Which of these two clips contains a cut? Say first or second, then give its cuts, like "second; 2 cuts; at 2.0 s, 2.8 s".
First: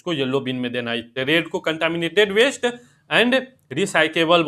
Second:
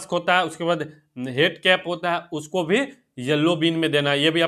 first; 1 cut; at 1.1 s